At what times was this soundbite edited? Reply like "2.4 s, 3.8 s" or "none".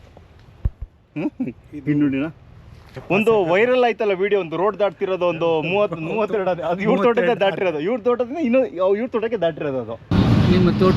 2.9 s, 10.0 s

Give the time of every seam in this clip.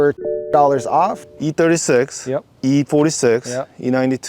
1.2 s

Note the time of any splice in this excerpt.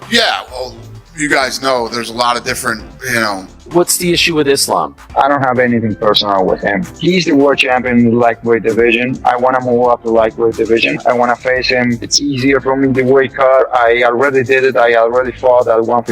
3.7 s

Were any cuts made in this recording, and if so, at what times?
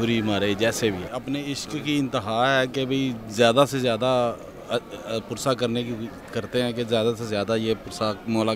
1.1 s

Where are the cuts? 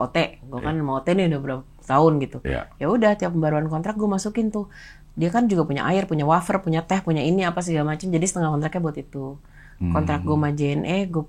none

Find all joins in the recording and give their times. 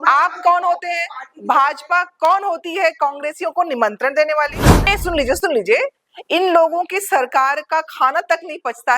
4.9 s

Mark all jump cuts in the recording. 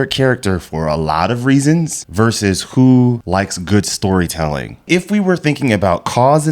2.0 s, 3.2 s, 4.7 s

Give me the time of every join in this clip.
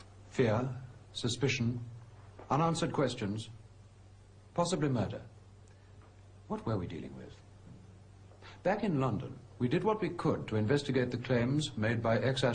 10.2 s

